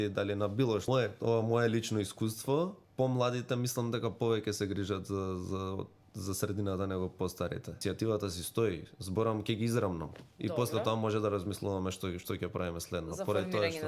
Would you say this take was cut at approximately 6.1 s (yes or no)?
no